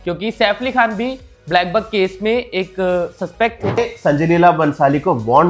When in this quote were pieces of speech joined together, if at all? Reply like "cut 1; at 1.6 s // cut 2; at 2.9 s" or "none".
cut 1; at 3.8 s